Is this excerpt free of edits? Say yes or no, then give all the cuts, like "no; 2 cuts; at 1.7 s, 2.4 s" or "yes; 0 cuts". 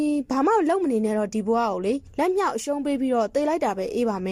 yes; 0 cuts